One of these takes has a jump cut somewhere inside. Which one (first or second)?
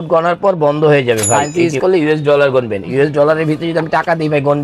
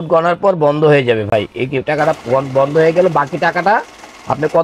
first